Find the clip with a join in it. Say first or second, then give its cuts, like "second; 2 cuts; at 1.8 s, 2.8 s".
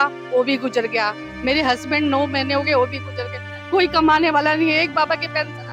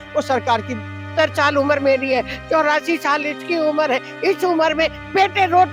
second; 1 cut; at 1.1 s